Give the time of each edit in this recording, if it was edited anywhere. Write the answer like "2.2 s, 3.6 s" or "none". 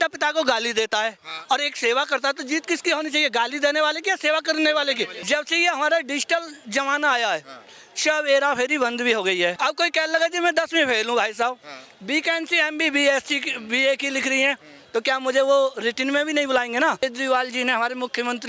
5.2 s, 9.6 s, 17.0 s

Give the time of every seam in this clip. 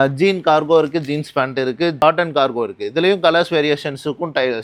none

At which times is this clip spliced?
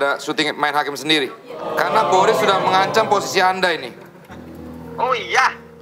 1.9 s

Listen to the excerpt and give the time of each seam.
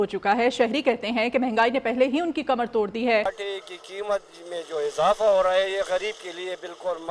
3.4 s

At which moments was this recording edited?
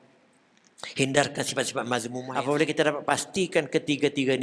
2.2 s

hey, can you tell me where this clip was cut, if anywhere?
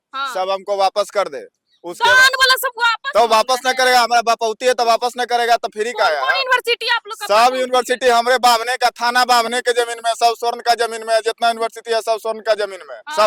none

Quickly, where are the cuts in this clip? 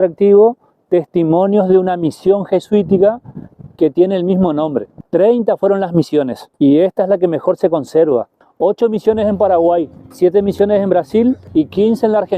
4.9 s, 6.4 s, 8.4 s, 10.0 s, 11.4 s

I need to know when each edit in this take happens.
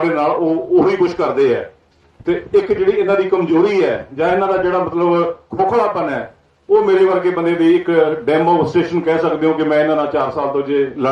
none

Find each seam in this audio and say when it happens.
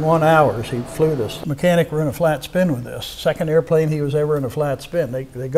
1.4 s

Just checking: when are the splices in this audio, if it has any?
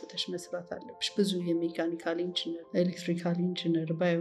2.6 s

